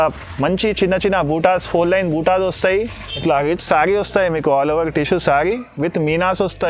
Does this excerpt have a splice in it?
yes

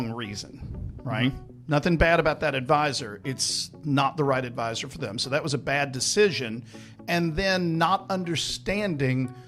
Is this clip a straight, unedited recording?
yes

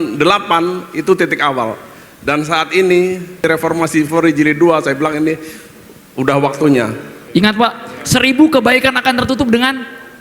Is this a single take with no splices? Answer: no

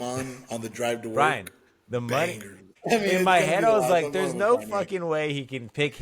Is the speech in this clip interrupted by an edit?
yes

